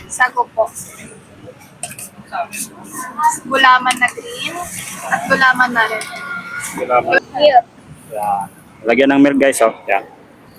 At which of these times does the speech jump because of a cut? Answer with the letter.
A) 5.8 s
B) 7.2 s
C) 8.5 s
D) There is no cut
B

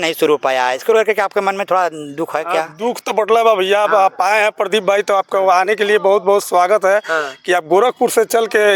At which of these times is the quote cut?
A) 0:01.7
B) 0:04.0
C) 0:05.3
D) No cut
D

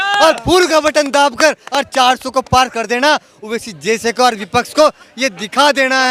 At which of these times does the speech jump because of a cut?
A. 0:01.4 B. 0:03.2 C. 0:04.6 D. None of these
D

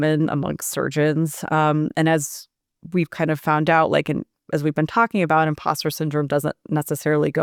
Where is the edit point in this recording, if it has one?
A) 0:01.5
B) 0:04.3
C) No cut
C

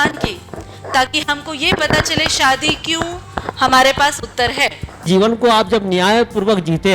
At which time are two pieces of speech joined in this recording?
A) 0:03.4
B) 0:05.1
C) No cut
B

